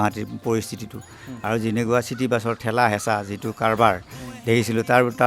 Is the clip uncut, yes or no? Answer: yes